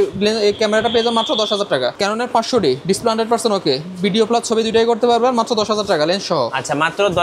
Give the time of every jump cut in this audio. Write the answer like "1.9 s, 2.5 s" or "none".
2.0 s